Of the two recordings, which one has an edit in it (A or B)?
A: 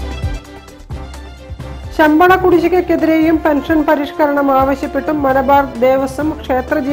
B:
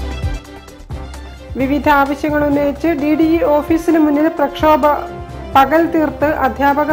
A